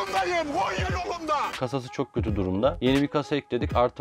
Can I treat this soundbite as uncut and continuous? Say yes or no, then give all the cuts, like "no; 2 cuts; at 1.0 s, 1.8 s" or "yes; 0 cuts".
no; 2 cuts; at 1.5 s, 2.8 s